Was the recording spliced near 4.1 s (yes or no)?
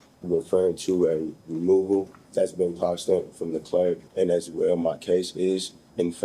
yes